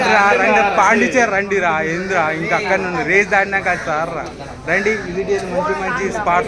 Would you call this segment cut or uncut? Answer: uncut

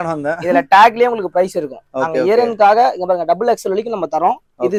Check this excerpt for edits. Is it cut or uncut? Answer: uncut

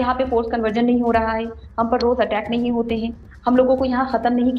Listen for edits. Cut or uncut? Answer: uncut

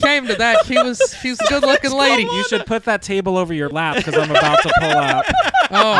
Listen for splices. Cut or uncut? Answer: cut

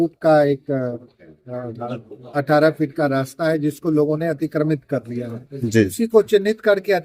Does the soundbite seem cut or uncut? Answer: uncut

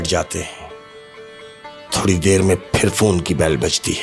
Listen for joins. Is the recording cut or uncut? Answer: uncut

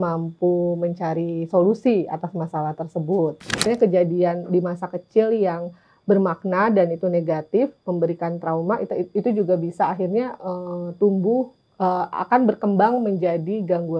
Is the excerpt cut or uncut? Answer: cut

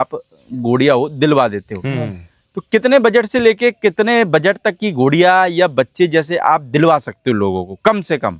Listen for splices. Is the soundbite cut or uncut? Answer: uncut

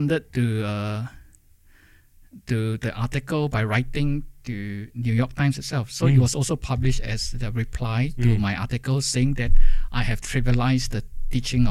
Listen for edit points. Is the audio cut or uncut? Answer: uncut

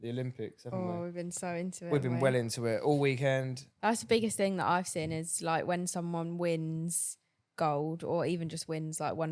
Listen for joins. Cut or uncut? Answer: cut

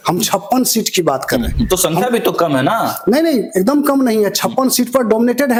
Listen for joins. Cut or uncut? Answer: uncut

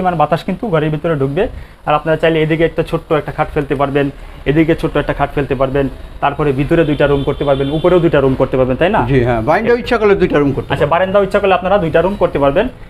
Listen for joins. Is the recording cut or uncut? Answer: uncut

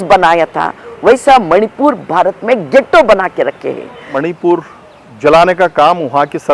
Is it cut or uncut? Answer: cut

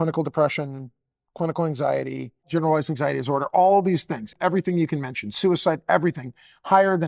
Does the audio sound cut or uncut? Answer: cut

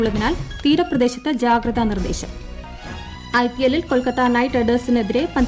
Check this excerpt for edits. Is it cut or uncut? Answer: cut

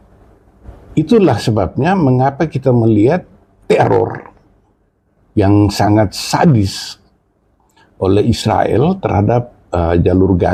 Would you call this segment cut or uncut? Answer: uncut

